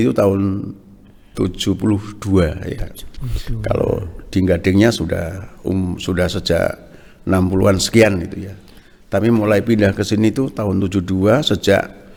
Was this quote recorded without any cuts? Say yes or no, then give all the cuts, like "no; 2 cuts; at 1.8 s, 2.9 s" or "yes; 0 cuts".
yes; 0 cuts